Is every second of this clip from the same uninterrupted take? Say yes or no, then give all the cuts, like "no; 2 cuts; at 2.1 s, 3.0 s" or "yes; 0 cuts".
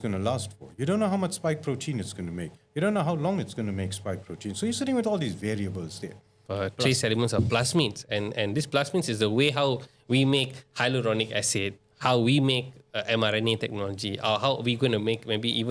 no; 1 cut; at 6.4 s